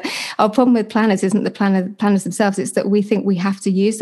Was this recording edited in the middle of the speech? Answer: yes; 1 cut; at 1.9 s

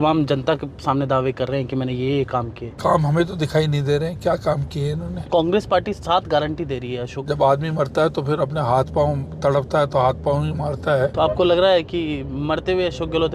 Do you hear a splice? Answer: yes; 4 cuts; at 2.8 s, 5.2 s, 7.1 s, 11.1 s

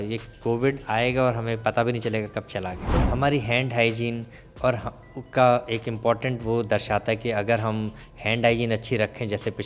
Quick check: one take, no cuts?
no; 1 cut; at 2.9 s

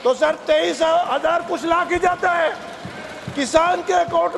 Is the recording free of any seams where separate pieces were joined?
yes; 0 cuts

